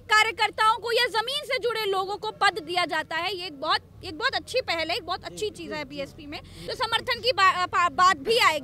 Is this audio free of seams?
no; 1 cut; at 6.7 s

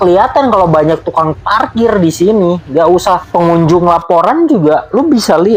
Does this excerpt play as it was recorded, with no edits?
yes; 0 cuts

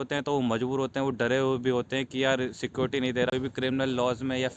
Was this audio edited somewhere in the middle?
yes; 1 cut; at 3.3 s

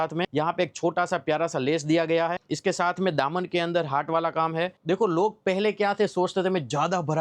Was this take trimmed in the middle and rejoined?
yes; 1 cut; at 4.8 s

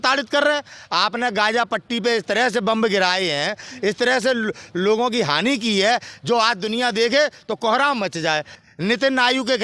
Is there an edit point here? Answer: yes; 1 cut; at 8.5 s

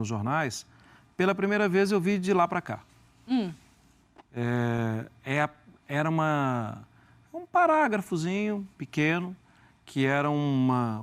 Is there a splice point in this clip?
no; 0 cuts

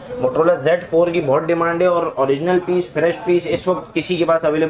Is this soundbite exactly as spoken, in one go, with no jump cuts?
yes; 0 cuts

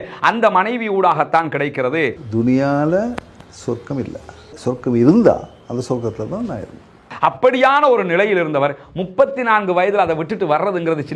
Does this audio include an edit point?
yes; 2 cuts; at 2.2 s, 4.5 s

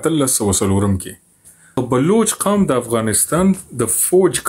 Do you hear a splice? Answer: yes; 1 cut; at 1.8 s

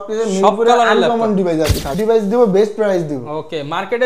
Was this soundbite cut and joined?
yes; 1 cut; at 1.9 s

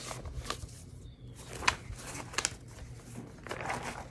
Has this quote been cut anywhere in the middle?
no; 0 cuts

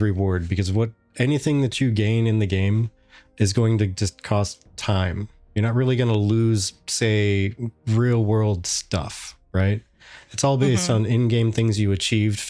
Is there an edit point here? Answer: no; 0 cuts

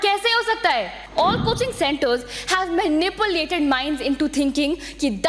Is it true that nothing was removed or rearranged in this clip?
no; 1 cut; at 1.0 s

